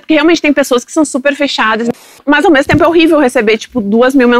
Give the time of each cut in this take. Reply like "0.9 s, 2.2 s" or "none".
2.1 s